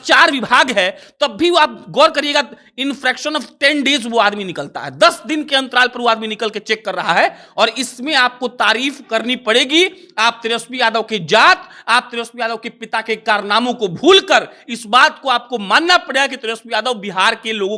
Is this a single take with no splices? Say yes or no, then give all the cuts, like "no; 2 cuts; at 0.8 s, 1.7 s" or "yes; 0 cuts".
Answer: yes; 0 cuts